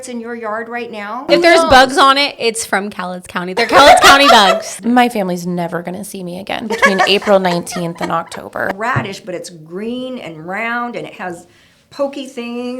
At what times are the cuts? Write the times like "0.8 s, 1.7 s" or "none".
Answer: 1.3 s, 4.7 s, 8.7 s